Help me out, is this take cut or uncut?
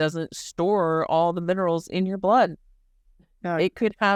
uncut